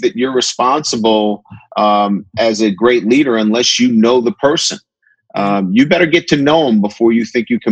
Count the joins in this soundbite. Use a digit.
0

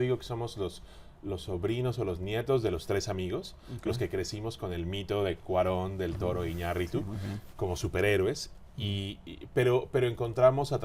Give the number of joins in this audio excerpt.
0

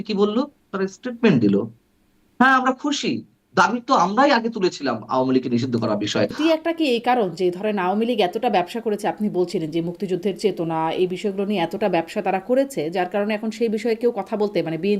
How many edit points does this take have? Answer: 1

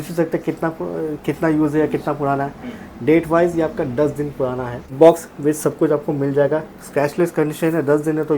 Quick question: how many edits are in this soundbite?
1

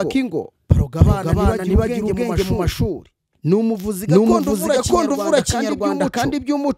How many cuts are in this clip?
0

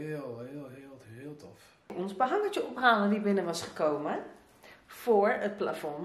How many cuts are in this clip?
1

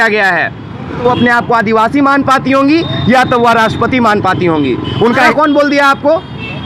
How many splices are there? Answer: 2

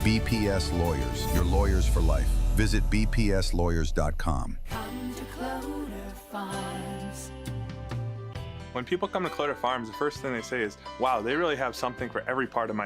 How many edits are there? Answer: 1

